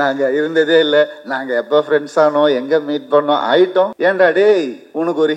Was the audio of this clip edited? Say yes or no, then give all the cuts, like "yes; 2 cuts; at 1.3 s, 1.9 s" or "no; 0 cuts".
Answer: yes; 1 cut; at 3.9 s